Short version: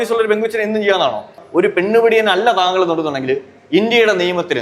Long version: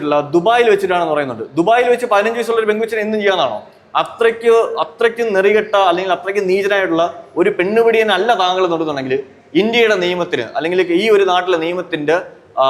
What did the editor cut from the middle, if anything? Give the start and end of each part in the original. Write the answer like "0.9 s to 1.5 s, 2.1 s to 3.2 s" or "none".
3.8 s to 7.2 s